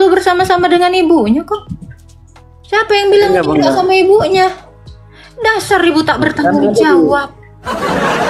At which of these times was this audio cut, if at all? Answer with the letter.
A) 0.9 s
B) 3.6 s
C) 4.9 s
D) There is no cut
D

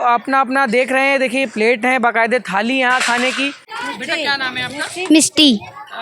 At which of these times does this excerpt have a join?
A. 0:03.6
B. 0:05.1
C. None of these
A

